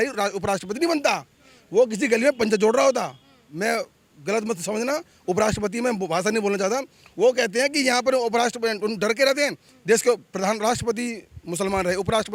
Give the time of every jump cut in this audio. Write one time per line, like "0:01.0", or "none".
none